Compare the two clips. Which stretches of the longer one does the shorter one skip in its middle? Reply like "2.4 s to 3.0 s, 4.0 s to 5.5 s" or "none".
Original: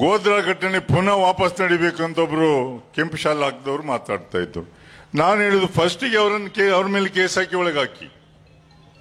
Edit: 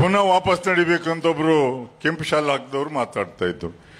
none